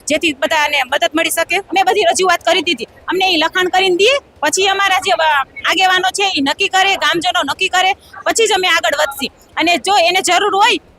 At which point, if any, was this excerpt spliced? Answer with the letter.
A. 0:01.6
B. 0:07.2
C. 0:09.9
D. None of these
A